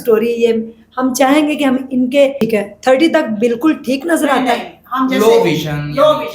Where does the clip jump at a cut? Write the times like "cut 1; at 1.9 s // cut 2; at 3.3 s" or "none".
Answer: cut 1; at 2.4 s